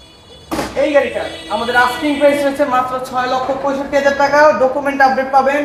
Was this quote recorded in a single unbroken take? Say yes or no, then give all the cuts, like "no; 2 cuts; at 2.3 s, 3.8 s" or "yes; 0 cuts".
yes; 0 cuts